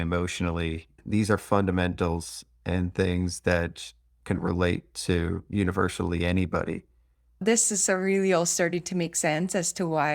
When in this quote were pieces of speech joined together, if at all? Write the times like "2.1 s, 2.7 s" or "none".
1.0 s, 7.4 s